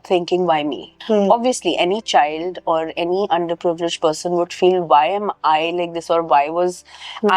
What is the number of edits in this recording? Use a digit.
1